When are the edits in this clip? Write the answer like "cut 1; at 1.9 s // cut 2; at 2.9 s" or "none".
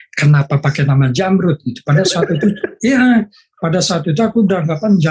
none